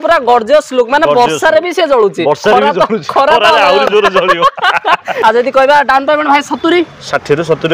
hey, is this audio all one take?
no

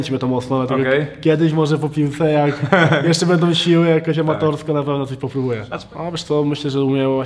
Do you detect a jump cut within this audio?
yes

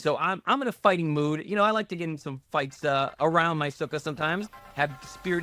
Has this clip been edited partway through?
no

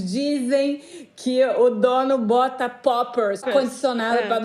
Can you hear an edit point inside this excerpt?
yes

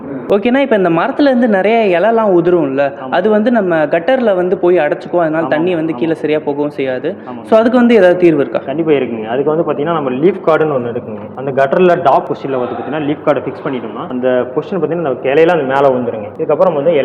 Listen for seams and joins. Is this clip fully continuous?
yes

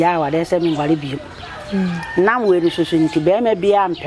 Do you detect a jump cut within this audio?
no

